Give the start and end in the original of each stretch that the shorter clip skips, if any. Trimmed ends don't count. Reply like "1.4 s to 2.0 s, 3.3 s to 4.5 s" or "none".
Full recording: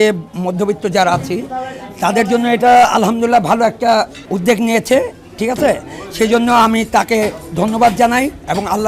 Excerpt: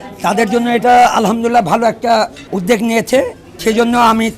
5.2 s to 6.0 s

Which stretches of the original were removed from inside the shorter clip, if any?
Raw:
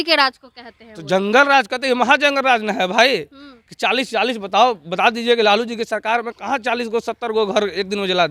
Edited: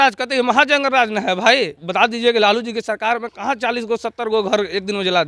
3.3 s to 4.9 s

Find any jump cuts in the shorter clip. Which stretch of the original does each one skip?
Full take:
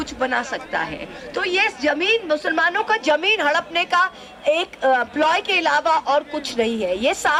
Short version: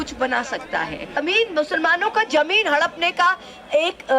1.2 s to 1.9 s

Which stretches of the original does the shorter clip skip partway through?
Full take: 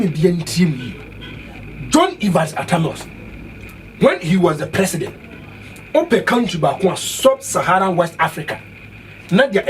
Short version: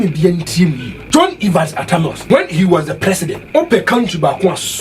0.9 s to 1.7 s, 3.0 s to 3.9 s, 5.1 s to 5.8 s

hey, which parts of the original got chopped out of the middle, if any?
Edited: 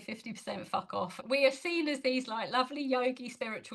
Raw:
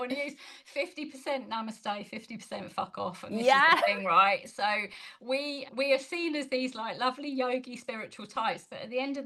3.2 s to 5.6 s

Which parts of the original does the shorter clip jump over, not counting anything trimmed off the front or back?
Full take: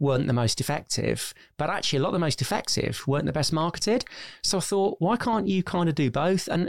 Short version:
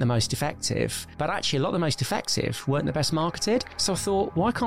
1.3 s to 1.4 s, 4.1 s to 4.4 s

